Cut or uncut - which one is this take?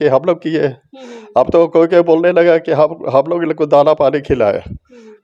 uncut